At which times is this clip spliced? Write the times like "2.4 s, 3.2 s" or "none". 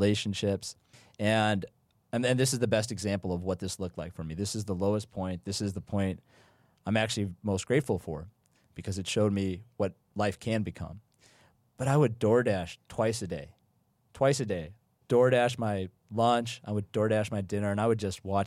none